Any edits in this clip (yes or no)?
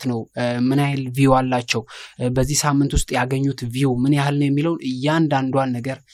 no